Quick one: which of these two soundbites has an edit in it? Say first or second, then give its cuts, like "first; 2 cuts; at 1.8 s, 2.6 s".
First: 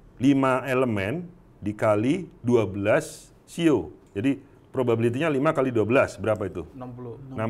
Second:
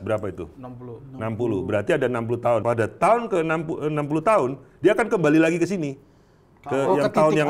second; 1 cut; at 2.6 s